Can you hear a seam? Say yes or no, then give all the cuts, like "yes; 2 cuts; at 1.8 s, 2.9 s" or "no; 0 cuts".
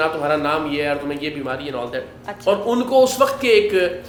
no; 0 cuts